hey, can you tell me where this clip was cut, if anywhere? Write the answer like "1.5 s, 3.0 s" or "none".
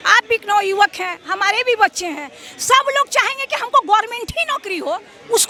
none

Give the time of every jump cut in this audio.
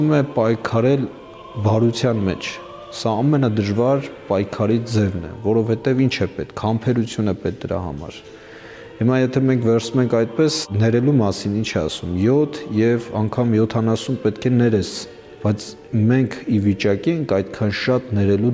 none

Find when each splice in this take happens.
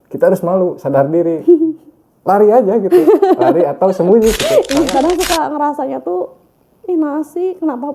4.9 s

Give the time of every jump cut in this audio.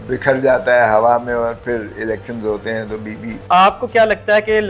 3.4 s

